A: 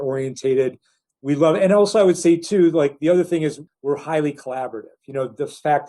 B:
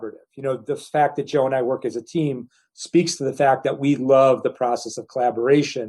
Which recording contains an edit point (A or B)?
A